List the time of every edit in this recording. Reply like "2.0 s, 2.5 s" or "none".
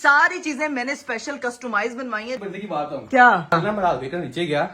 2.4 s, 3.5 s